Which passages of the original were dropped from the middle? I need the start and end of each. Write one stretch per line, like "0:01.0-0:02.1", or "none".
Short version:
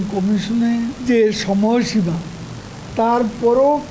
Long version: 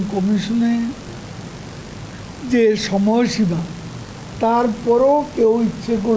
0:01.0-0:02.4